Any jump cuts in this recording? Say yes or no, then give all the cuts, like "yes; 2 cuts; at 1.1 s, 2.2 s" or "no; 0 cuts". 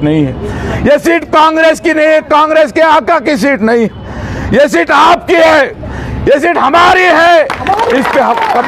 no; 0 cuts